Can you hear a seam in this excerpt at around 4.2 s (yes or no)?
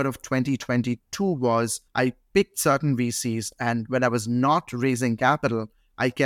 no